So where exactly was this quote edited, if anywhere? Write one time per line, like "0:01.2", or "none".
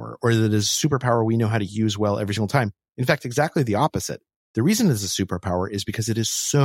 none